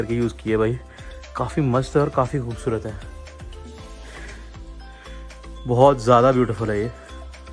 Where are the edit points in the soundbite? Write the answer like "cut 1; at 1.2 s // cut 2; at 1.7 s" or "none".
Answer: none